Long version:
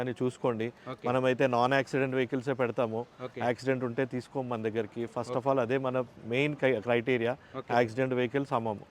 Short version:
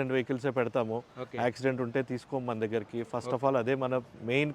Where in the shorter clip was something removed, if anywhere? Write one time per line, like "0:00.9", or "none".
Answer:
none